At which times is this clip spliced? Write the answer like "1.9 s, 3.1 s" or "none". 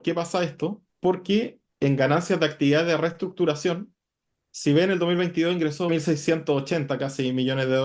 0.9 s, 1.6 s, 5.9 s